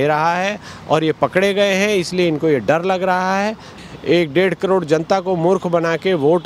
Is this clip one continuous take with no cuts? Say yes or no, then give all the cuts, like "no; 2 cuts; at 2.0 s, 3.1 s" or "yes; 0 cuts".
no; 1 cut; at 3.7 s